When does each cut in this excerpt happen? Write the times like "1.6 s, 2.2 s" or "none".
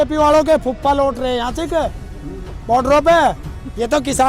none